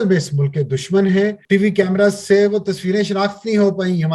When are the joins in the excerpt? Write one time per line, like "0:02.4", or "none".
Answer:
0:01.4